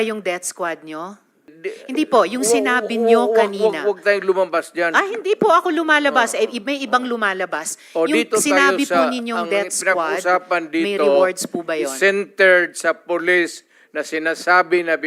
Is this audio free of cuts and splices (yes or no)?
no